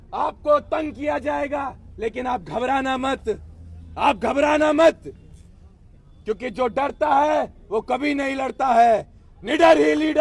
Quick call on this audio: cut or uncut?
uncut